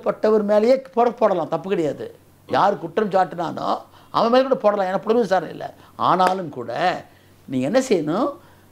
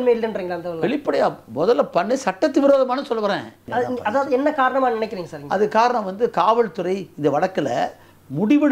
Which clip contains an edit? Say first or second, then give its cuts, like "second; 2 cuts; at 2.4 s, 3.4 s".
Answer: second; 1 cut; at 3.7 s